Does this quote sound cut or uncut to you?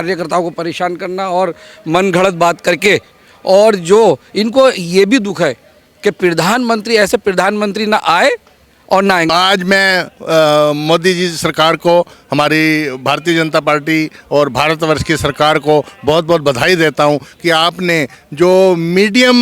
cut